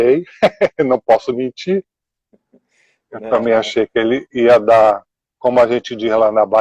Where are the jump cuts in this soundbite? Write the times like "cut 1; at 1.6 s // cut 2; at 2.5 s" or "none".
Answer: cut 1; at 4.1 s